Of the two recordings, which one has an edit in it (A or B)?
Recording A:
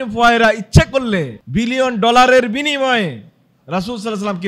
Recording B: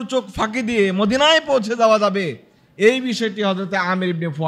A